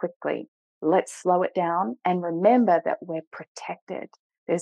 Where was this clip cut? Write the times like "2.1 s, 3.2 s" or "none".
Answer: none